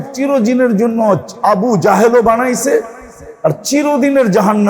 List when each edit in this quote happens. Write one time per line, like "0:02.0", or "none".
none

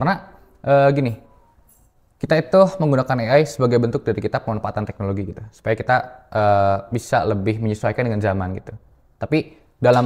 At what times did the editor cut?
none

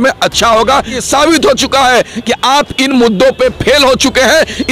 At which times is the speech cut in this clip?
0:01.0

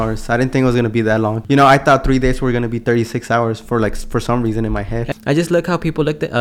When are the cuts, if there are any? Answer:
0:01.4
0:05.1

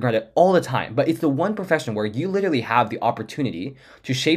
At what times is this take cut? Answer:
none

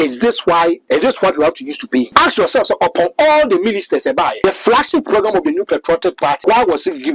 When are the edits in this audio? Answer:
0:00.8
0:02.1
0:04.4
0:06.4

